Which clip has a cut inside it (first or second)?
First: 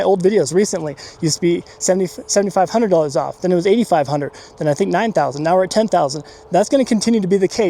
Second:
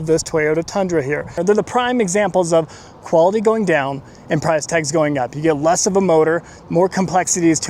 second